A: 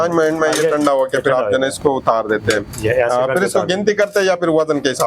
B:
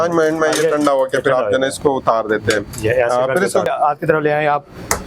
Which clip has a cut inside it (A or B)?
B